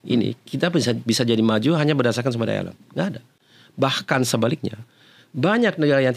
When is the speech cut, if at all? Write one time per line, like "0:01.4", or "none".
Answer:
none